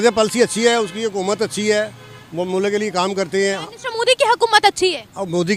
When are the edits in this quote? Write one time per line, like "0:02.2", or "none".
none